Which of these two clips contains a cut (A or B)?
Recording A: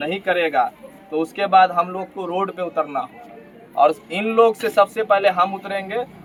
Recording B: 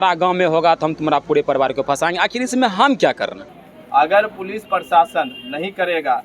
B